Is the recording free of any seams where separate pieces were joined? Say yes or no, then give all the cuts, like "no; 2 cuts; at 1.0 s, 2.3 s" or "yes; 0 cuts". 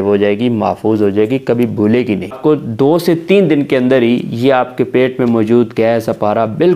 no; 1 cut; at 2.3 s